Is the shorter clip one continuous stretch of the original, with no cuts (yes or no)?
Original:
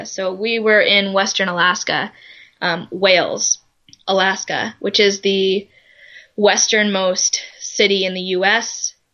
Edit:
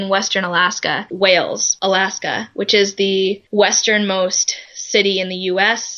no